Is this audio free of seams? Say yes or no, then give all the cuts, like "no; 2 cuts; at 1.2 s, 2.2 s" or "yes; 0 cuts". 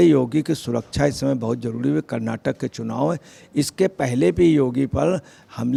yes; 0 cuts